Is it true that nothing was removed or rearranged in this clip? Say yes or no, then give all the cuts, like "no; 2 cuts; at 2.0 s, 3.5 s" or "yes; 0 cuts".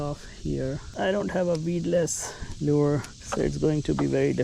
no; 2 cuts; at 0.9 s, 3.2 s